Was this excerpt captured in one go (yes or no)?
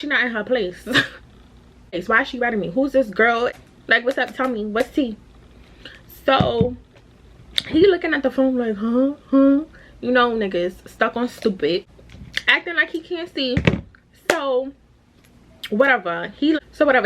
yes